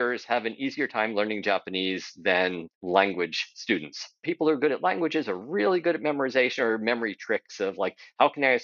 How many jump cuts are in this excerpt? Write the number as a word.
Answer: two